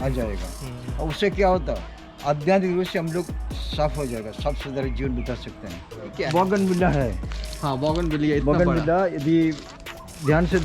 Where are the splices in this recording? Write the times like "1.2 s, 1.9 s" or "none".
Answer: 6.2 s